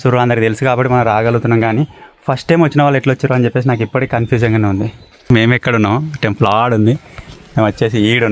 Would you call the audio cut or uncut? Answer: cut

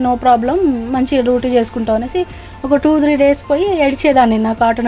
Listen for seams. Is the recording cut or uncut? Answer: uncut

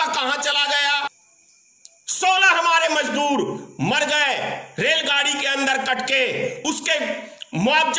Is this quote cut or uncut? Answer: cut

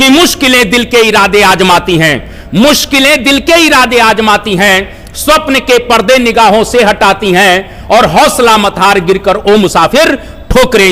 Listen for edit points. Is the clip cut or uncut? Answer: uncut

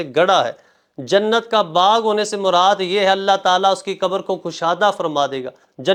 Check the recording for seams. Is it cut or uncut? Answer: uncut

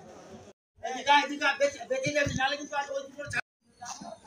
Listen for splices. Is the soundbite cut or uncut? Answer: cut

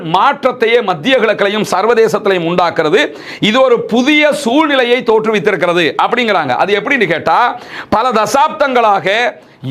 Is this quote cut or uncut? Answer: uncut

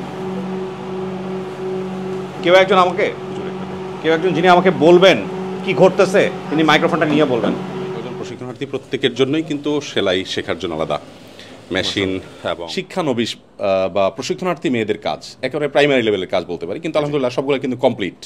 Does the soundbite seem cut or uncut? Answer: cut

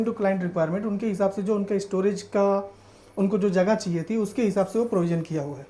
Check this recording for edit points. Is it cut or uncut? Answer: uncut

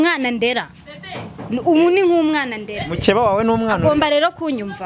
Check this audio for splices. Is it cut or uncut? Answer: uncut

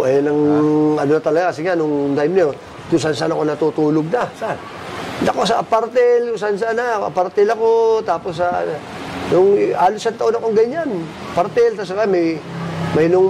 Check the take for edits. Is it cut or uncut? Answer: uncut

